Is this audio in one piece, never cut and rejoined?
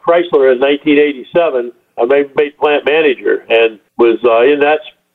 no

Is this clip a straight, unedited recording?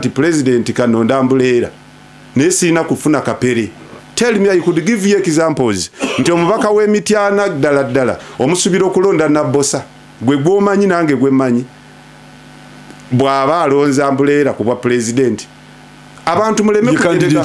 yes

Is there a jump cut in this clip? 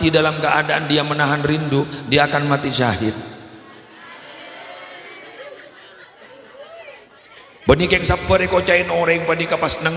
yes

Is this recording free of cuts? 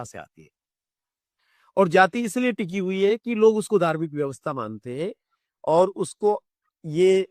yes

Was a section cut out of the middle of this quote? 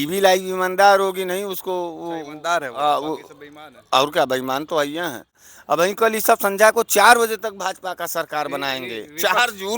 yes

